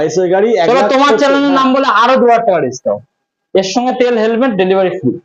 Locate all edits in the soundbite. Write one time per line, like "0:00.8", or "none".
none